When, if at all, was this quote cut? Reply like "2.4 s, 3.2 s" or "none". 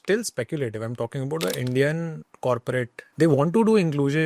3.0 s